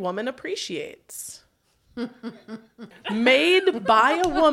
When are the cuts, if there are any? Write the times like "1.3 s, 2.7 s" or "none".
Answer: 3.0 s